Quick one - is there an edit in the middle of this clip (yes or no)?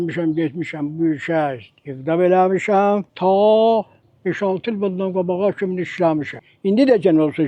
yes